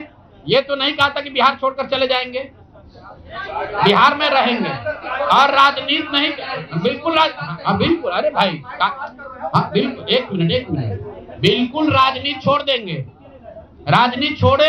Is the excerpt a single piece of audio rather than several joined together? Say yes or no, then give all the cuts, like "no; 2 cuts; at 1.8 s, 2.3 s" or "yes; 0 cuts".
yes; 0 cuts